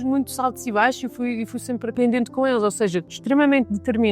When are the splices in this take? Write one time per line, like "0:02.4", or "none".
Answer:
0:01.9
0:03.1